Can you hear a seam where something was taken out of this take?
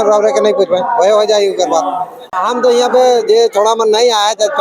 yes; 1 cut; at 2.4 s

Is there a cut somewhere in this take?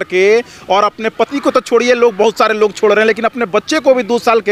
no; 0 cuts

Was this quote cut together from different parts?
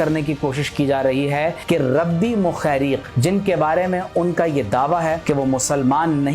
yes; 3 cuts; at 1.6 s, 3.1 s, 5.2 s

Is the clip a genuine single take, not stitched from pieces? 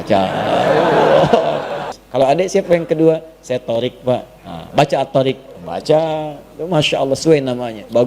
no; 1 cut; at 1.9 s

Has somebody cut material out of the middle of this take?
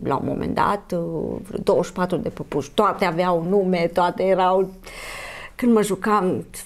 no; 0 cuts

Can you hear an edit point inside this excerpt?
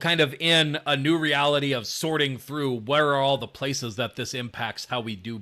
no; 0 cuts

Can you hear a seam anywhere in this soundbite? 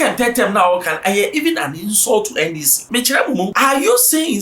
yes; 2 cuts; at 2.7 s, 3.5 s

